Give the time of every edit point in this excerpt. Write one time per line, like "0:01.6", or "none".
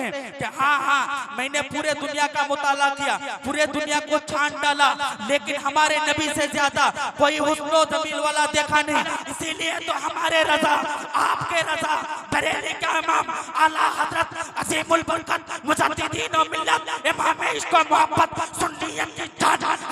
0:09.1